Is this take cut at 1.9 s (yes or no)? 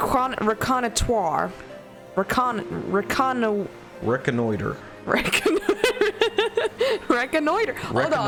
no